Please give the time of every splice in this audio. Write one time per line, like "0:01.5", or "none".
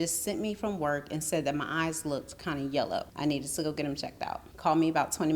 0:03.1
0:04.5